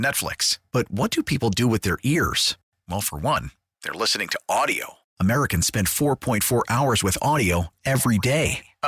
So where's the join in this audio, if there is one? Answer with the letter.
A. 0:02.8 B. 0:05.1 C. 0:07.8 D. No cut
D